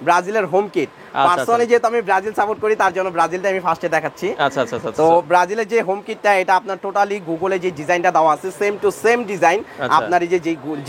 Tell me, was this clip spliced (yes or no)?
no